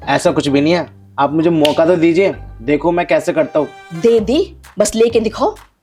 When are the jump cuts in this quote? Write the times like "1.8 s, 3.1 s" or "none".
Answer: none